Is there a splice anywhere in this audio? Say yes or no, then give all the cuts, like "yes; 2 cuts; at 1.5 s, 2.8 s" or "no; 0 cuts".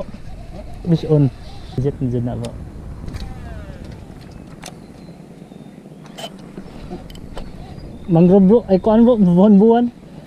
yes; 1 cut; at 1.8 s